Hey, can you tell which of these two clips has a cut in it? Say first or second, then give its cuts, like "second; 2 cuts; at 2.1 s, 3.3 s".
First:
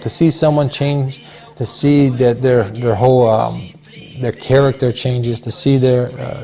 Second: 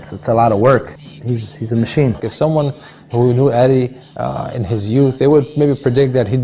second; 1 cut; at 2.2 s